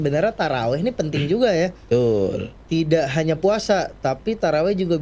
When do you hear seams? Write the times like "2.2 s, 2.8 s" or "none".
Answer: none